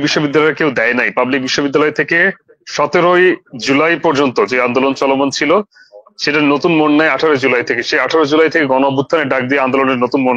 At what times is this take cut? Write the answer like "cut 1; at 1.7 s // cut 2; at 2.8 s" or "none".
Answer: none